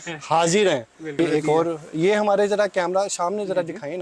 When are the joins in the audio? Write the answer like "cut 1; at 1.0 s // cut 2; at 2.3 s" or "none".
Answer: cut 1; at 1.2 s